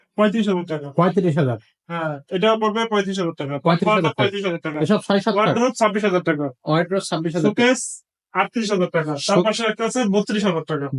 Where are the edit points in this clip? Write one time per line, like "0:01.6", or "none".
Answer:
none